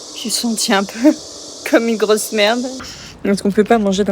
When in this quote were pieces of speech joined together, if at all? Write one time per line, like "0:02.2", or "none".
0:02.9